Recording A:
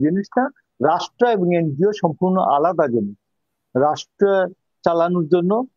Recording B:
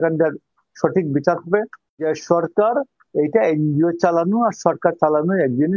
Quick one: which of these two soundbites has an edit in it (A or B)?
B